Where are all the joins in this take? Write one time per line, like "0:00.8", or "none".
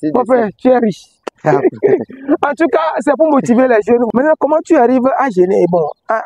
0:04.1